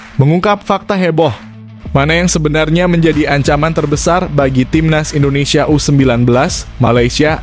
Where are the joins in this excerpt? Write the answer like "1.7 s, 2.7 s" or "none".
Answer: none